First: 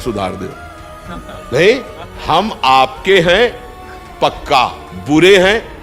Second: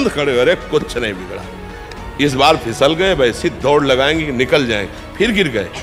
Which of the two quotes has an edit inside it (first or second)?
first